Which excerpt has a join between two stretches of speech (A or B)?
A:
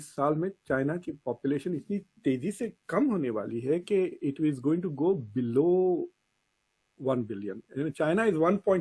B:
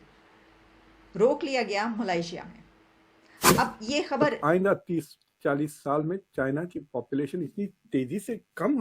B